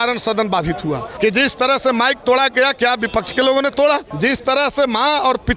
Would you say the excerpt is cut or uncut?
cut